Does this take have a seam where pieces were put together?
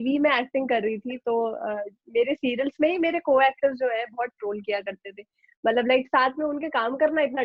no; 0 cuts

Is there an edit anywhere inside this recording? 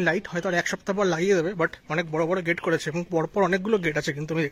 no; 0 cuts

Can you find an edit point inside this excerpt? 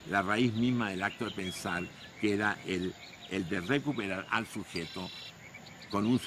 no; 0 cuts

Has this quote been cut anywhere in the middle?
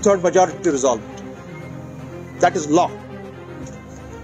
no; 0 cuts

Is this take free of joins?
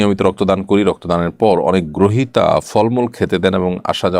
yes; 0 cuts

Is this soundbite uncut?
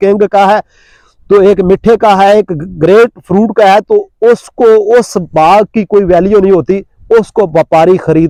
yes; 0 cuts

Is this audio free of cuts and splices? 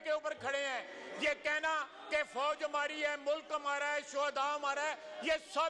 yes; 0 cuts

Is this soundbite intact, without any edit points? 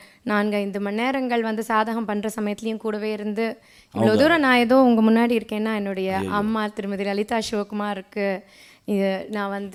yes; 0 cuts

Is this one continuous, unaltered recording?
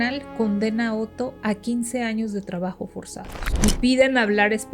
no; 1 cut; at 3.5 s

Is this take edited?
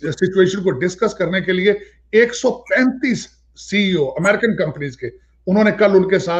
no; 0 cuts

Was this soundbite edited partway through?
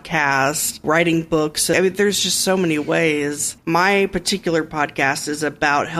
yes; 3 cuts; at 0.8 s, 1.7 s, 3.5 s

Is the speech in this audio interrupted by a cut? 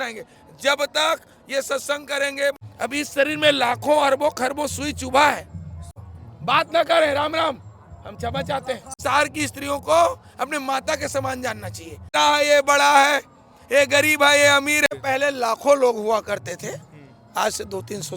yes; 5 cuts; at 2.6 s, 6.1 s, 9.0 s, 12.1 s, 14.9 s

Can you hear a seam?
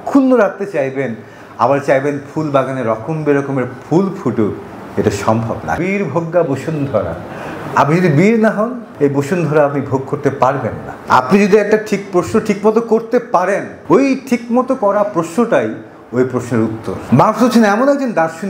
yes; 5 cuts; at 5.8 s, 8.8 s, 10.9 s, 13.7 s, 17.0 s

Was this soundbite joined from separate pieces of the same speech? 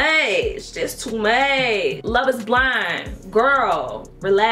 yes; 1 cut; at 2.0 s

